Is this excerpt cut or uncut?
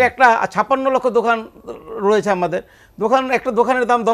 uncut